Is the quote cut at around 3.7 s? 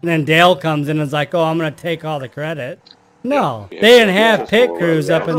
yes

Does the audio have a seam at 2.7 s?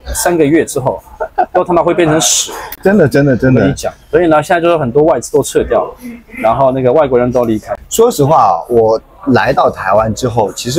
no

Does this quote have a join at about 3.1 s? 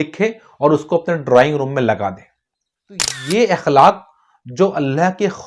yes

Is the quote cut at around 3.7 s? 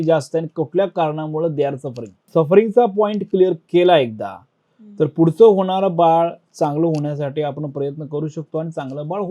no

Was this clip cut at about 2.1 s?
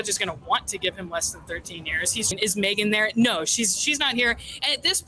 yes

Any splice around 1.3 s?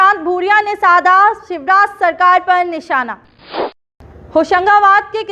no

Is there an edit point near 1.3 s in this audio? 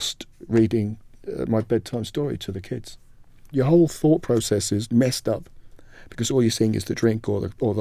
no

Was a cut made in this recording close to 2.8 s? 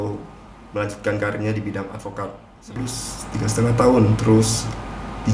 yes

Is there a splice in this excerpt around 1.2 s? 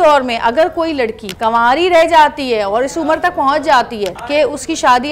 yes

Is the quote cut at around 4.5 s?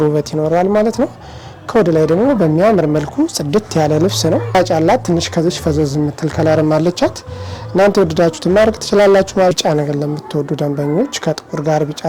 yes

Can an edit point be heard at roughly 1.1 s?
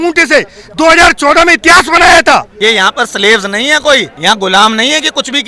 no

